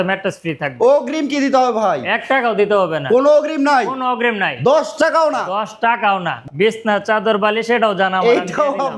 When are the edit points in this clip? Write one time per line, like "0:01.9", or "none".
0:06.4